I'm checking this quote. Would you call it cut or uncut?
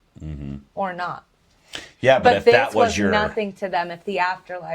uncut